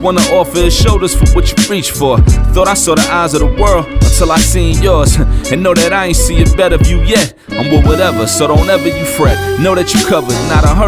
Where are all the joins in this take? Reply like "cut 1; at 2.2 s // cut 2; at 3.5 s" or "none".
none